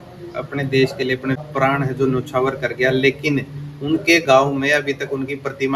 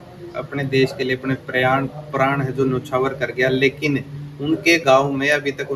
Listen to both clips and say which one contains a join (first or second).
first